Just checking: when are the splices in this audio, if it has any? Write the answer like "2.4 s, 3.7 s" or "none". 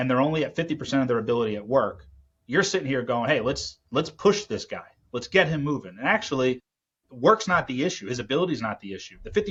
none